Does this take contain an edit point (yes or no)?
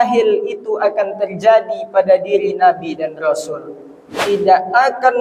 yes